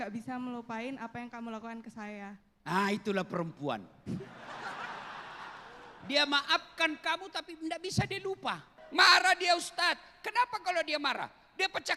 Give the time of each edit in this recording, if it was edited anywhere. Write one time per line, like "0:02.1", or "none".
0:08.7

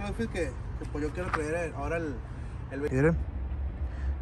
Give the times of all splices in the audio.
0:02.9

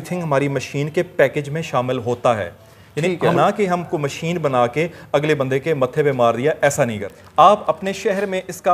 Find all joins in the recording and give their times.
0:03.4
0:07.2

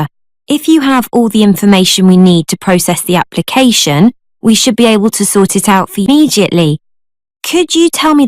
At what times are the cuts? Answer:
0:06.1

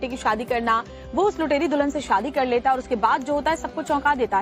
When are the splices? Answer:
none

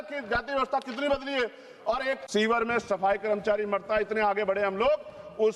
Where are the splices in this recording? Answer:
0:02.2

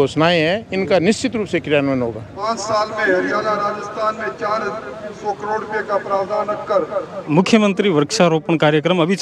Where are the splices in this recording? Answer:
0:02.3
0:07.2

